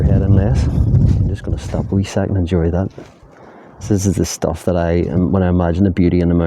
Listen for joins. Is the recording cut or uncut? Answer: cut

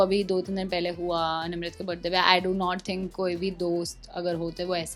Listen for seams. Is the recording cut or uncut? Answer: uncut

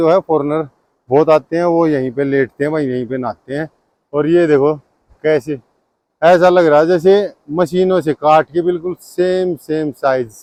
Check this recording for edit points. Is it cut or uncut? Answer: uncut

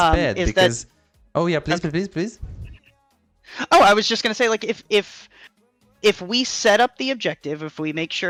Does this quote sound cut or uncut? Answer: uncut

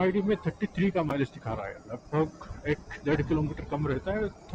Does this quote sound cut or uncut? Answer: uncut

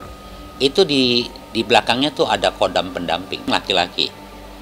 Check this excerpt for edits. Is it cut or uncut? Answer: cut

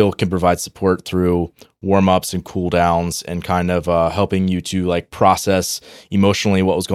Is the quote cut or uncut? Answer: uncut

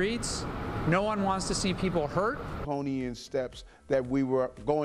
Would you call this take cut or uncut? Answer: cut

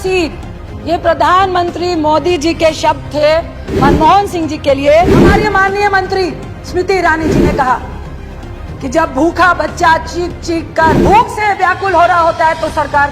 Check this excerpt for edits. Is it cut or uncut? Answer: cut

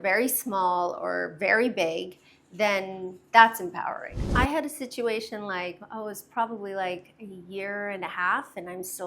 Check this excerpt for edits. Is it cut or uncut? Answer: cut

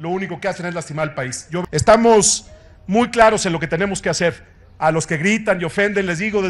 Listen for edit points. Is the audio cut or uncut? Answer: cut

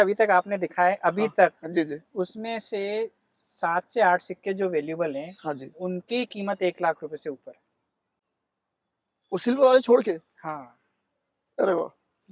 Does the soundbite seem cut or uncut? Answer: uncut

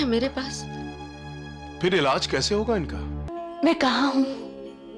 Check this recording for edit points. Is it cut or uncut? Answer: cut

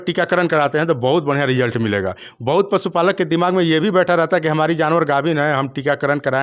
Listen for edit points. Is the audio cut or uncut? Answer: uncut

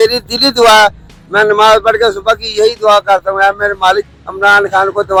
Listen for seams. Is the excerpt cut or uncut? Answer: uncut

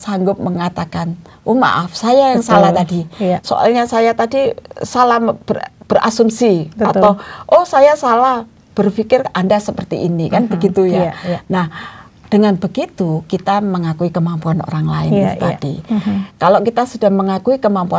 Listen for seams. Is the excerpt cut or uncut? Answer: uncut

